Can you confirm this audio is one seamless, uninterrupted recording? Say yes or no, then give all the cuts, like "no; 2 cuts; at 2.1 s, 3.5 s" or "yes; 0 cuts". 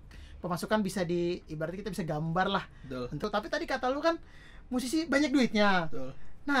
no; 1 cut; at 3.3 s